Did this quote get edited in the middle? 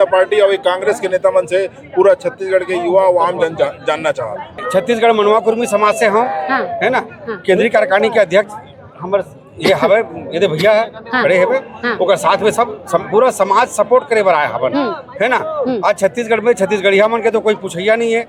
no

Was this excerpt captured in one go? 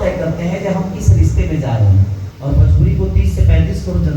no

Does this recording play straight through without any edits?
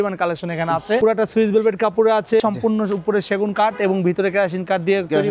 no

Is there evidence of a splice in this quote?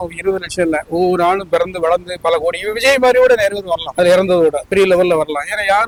no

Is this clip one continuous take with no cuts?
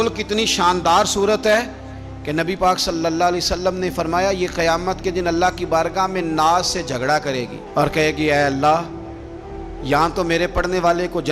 yes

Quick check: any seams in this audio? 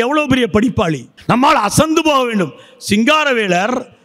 yes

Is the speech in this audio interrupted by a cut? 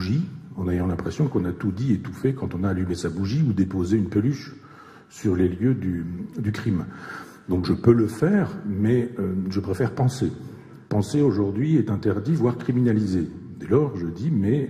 no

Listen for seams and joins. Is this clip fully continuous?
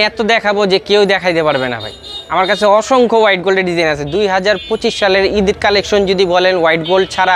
yes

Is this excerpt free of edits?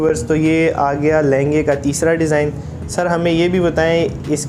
yes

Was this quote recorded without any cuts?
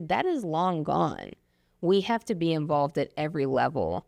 yes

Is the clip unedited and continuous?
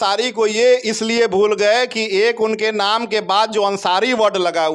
yes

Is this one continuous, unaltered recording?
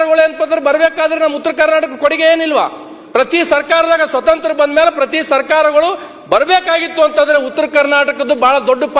yes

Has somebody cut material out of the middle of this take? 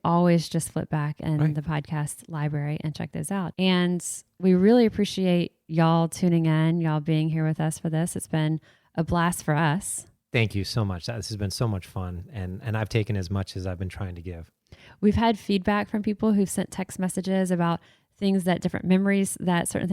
yes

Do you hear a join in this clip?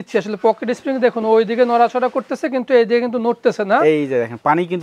no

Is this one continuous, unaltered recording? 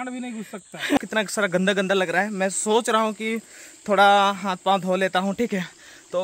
no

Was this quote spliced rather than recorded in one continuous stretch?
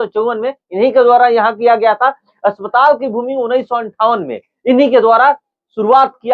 no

